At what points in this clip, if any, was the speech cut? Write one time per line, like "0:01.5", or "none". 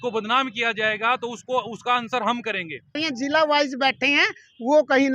0:03.0